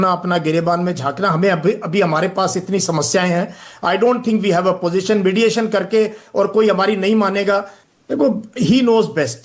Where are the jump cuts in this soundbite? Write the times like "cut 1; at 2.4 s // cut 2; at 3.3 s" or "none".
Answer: cut 1; at 7.7 s